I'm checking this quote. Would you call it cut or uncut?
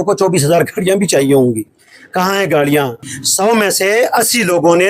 cut